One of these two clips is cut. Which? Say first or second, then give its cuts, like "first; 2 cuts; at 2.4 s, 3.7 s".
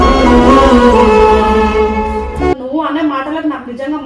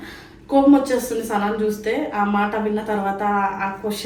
first; 1 cut; at 2.6 s